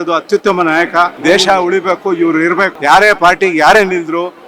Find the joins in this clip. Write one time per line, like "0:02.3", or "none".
0:01.2
0:02.7